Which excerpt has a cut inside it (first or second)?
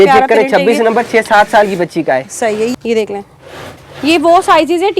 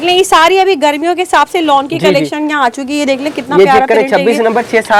first